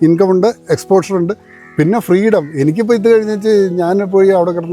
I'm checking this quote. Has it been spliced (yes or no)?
no